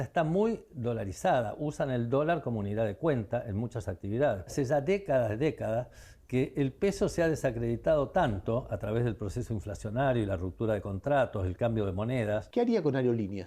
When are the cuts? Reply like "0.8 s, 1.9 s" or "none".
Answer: 4.5 s, 12.5 s